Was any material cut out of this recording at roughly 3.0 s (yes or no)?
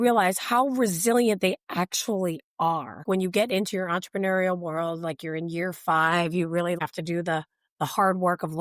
yes